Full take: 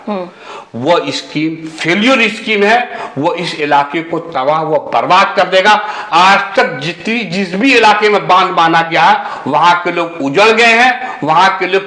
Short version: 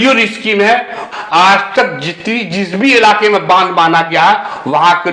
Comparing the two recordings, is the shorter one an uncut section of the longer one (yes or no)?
no